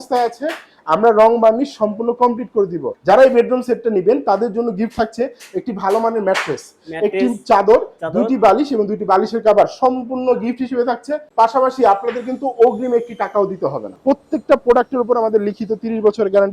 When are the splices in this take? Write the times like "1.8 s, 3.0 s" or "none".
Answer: 2.9 s, 11.3 s, 13.9 s

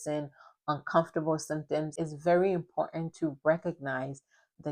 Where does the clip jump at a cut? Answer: 1.9 s

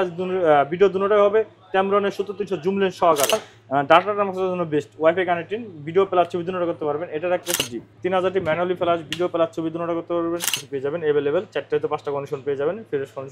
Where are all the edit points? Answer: 3.3 s, 7.6 s, 10.7 s

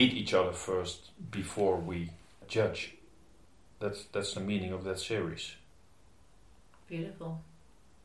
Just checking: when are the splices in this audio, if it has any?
none

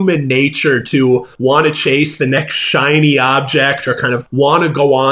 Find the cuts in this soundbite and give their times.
1.3 s, 4.2 s

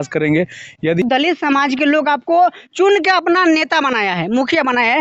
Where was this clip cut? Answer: 1.0 s

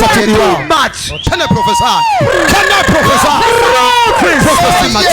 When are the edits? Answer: 1.3 s

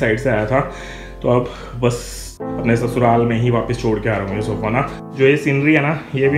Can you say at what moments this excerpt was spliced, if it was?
2.4 s, 4.9 s

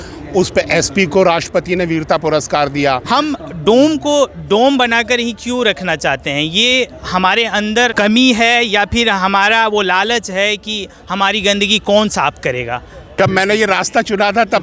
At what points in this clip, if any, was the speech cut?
3.0 s, 7.9 s, 13.1 s

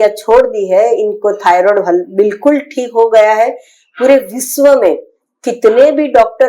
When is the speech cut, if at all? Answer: none

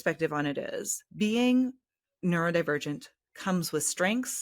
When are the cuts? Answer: 1.0 s

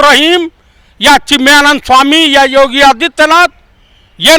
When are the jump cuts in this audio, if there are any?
none

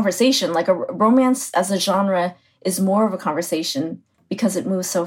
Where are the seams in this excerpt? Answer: none

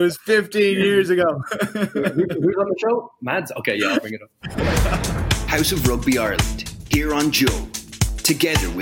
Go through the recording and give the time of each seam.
4.7 s

